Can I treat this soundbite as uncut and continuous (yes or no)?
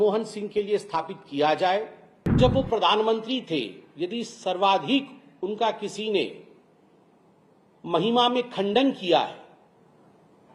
no